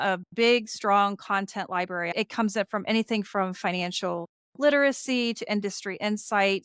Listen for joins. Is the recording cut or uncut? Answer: cut